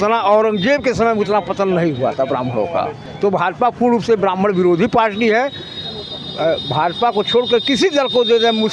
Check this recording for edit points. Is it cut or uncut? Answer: uncut